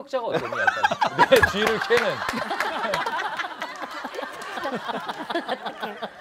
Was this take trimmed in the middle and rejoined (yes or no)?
no